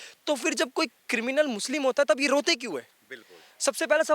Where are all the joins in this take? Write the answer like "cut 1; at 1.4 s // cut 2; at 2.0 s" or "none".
none

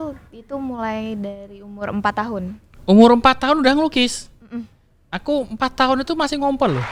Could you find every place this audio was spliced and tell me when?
none

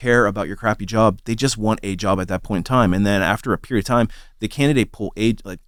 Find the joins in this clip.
none

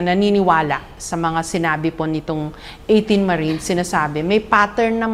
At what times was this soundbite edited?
none

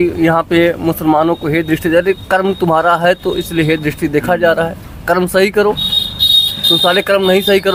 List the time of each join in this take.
none

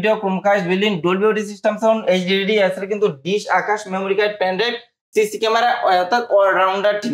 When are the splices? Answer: none

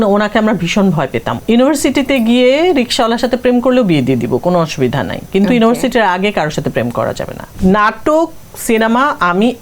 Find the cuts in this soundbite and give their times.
cut 1; at 1.3 s // cut 2; at 7.4 s

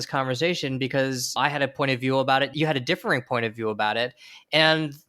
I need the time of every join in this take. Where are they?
cut 1; at 2.5 s

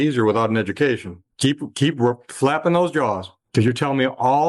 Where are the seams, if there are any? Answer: cut 1; at 1.2 s

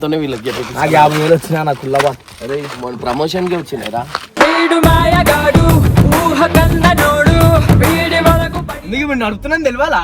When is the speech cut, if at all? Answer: cut 1; at 8.7 s

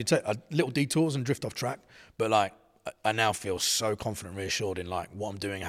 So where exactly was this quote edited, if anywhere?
none

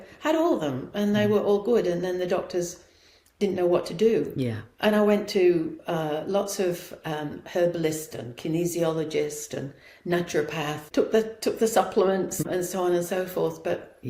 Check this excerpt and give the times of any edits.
cut 1; at 10.8 s // cut 2; at 12.4 s

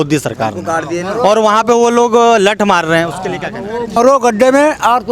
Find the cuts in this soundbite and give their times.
cut 1; at 4.0 s

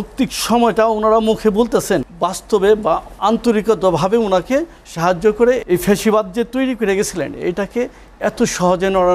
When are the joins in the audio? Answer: cut 1; at 2.1 s // cut 2; at 3.1 s // cut 3; at 5.6 s

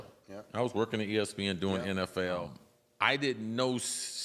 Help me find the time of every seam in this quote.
cut 1; at 2.4 s

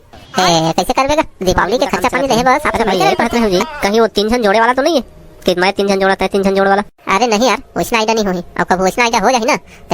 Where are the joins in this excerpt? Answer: cut 1; at 3.2 s

